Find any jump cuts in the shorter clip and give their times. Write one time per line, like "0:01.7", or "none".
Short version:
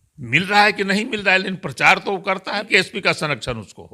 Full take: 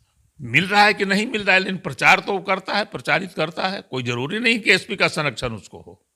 0:02.7